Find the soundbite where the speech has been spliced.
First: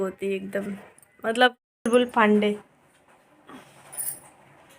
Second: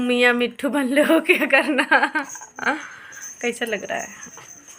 first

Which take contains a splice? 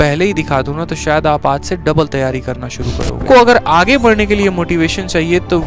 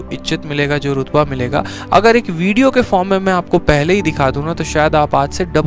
first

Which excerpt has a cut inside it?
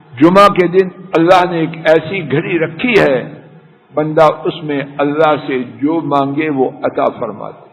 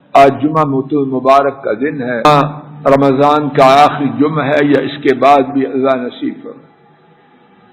second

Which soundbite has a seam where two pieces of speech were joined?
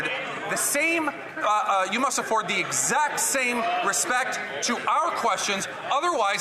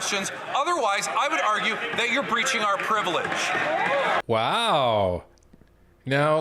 second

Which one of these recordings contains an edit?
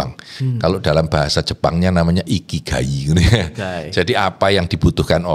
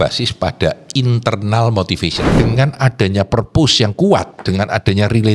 second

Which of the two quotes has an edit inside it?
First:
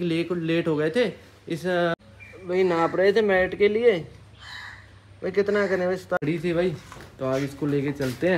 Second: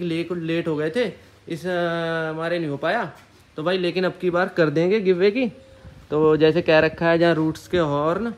first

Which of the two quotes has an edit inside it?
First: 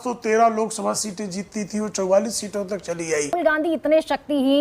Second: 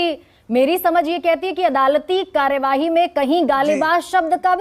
first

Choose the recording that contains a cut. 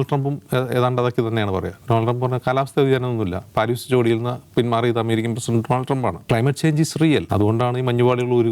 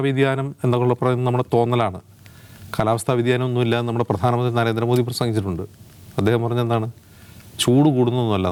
first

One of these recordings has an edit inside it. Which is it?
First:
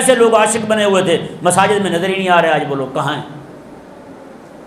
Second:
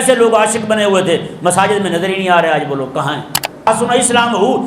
second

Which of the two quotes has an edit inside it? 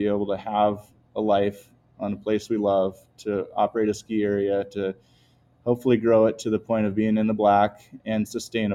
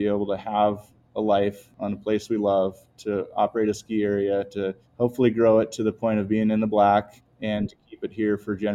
second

